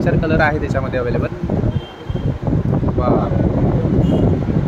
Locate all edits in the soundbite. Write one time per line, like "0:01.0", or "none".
0:01.3